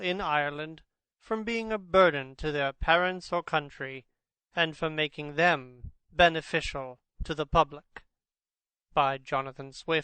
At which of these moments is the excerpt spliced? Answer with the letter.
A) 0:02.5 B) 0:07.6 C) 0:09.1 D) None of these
B